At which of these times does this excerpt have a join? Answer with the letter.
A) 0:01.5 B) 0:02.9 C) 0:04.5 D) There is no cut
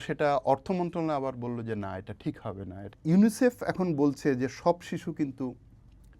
B